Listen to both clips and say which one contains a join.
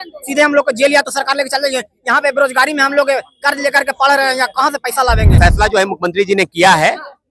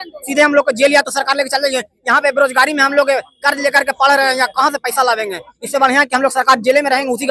first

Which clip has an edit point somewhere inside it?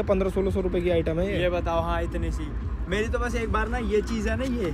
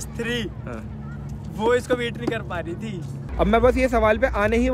second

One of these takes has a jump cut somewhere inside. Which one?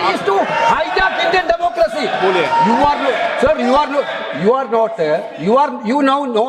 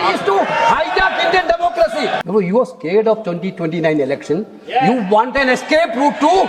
second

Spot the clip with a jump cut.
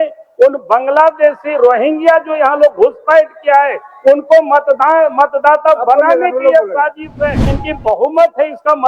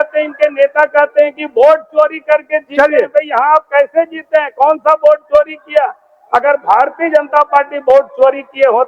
first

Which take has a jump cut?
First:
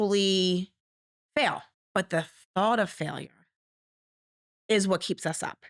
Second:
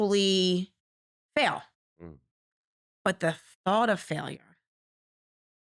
first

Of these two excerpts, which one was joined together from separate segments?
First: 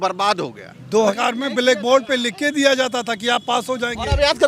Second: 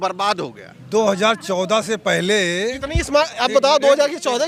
first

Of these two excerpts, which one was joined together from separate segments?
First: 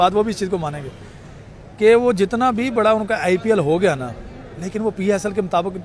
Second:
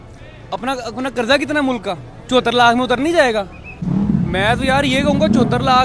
second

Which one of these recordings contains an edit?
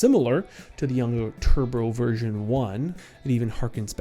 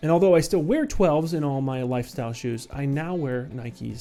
first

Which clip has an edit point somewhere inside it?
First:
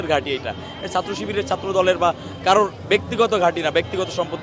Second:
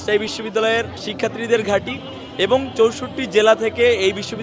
second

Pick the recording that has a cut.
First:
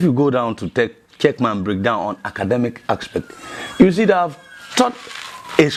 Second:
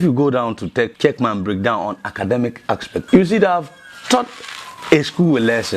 second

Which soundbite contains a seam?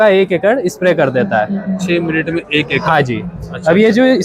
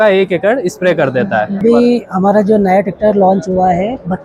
second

